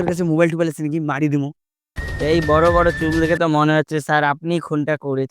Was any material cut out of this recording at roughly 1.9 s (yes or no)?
yes